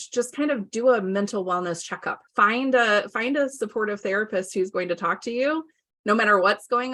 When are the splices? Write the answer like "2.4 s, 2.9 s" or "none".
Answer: none